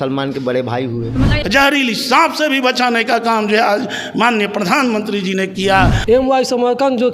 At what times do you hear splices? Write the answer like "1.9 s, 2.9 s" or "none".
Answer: 1.4 s, 6.0 s